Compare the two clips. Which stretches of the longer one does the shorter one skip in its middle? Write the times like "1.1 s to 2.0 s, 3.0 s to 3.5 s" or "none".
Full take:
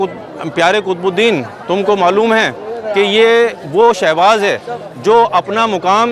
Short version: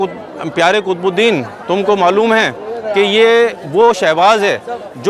none